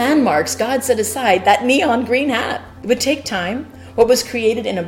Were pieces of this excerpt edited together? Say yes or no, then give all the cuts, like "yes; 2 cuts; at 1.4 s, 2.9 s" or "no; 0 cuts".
yes; 2 cuts; at 2.6 s, 3.8 s